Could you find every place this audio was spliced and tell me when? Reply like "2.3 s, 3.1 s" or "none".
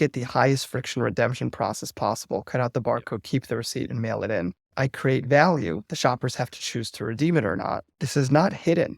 4.8 s, 8.0 s

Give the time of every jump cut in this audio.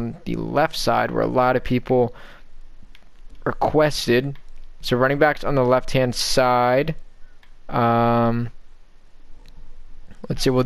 4.7 s

